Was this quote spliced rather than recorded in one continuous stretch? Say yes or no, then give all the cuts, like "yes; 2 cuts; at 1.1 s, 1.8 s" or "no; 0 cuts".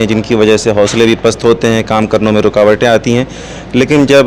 no; 0 cuts